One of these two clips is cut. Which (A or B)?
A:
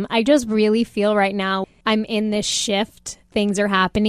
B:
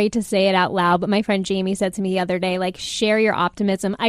A